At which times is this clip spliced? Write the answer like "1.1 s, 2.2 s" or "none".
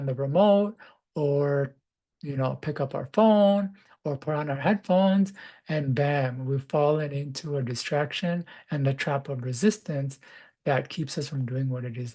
none